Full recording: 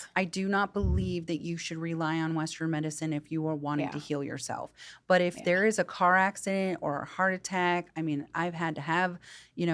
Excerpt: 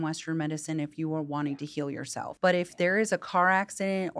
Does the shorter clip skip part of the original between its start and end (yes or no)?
yes